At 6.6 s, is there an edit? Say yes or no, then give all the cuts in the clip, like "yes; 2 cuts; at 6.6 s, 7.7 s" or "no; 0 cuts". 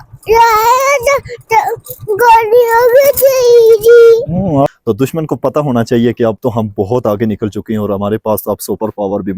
no; 1 cut; at 4.7 s